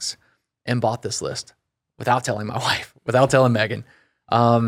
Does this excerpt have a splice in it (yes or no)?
no